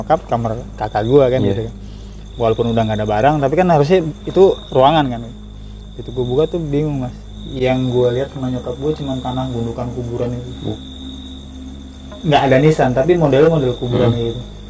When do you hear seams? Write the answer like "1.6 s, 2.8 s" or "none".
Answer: none